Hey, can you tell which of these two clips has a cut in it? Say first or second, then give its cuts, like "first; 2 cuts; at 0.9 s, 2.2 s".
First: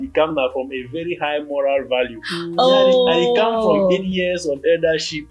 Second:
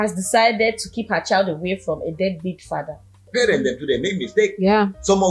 second; 1 cut; at 3.3 s